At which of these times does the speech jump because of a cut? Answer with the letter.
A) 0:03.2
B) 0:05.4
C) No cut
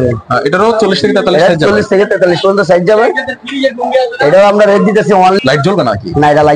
B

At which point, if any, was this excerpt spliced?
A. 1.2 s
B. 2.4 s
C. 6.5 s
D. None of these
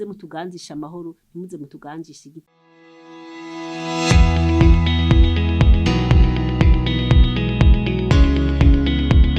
B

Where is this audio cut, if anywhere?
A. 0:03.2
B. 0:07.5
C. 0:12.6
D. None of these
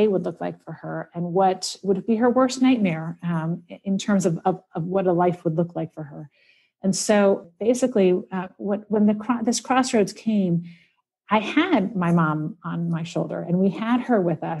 B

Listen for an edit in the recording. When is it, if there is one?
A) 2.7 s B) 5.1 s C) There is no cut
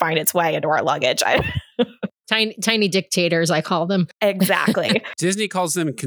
B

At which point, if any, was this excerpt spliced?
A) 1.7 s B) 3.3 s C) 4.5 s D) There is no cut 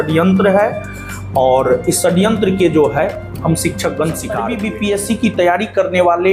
C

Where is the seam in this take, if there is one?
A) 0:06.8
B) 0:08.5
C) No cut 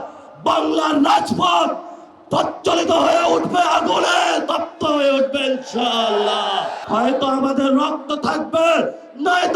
A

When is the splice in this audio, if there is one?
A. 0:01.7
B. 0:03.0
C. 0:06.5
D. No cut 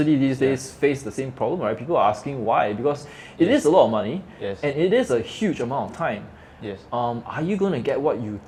D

